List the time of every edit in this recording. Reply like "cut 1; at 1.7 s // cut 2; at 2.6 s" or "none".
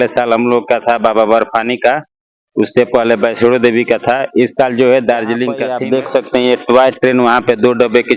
cut 1; at 5.7 s